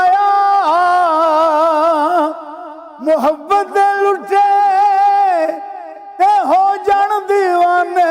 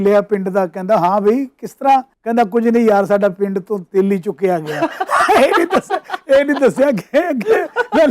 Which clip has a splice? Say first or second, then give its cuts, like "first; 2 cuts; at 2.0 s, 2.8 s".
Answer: second; 1 cut; at 2.2 s